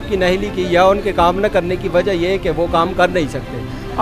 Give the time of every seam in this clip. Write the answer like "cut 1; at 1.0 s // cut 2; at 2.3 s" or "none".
none

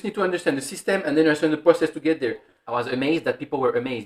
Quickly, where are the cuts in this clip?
cut 1; at 2.5 s

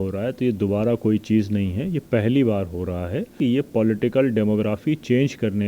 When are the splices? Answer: cut 1; at 3.3 s

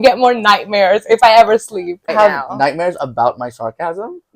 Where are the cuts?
cut 1; at 2.1 s

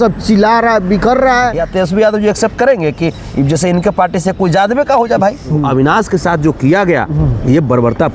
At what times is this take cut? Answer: cut 1; at 1.6 s // cut 2; at 5.6 s

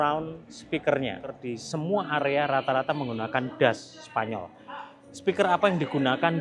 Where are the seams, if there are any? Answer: cut 1; at 1.5 s

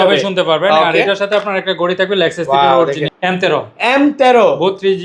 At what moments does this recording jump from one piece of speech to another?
cut 1; at 3.1 s

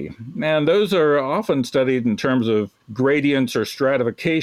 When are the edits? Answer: cut 1; at 2.8 s

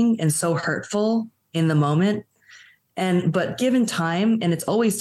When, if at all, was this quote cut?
none

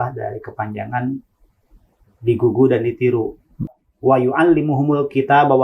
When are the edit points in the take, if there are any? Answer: cut 1; at 3.8 s

